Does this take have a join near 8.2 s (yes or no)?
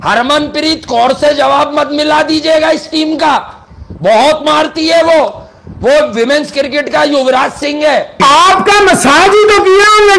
yes